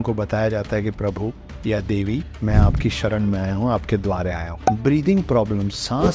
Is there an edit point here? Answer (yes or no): yes